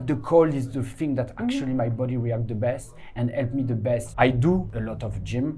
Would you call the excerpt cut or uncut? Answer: cut